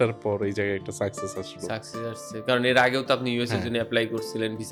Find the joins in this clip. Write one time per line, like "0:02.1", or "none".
none